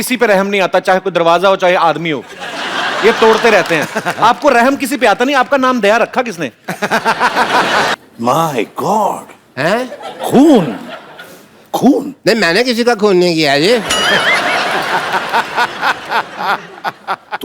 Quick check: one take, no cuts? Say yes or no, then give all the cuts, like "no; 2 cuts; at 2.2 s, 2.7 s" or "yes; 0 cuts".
no; 1 cut; at 7.9 s